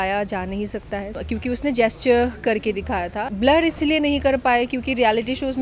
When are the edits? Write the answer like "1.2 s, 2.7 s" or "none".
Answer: 1.1 s, 3.2 s